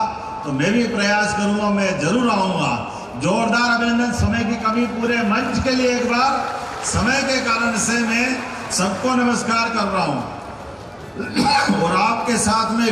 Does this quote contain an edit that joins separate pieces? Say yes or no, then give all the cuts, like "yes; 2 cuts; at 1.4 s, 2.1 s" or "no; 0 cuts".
no; 0 cuts